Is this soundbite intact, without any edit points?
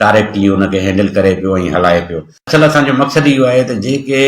no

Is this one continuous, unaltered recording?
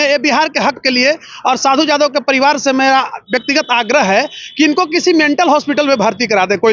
yes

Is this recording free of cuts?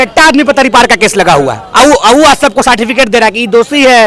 no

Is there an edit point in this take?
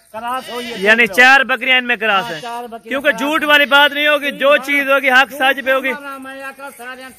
no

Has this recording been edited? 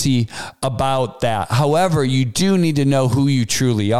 no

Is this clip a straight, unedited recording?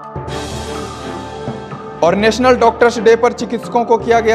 no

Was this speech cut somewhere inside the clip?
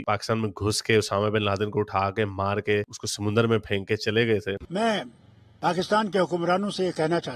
yes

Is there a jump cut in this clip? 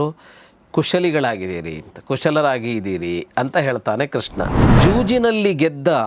yes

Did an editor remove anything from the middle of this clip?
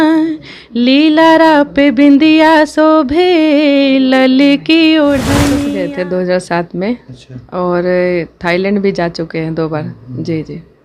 yes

